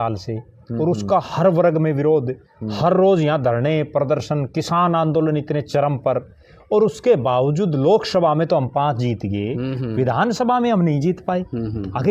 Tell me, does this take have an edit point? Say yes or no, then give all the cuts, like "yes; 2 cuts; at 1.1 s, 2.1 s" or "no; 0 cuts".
no; 0 cuts